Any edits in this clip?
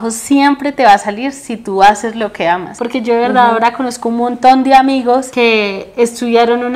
no; 0 cuts

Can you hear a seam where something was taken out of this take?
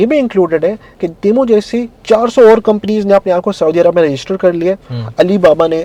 no; 0 cuts

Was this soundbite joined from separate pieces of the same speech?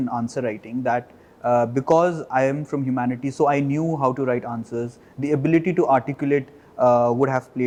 no; 0 cuts

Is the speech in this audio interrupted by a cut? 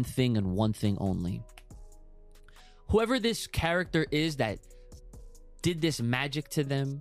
no; 0 cuts

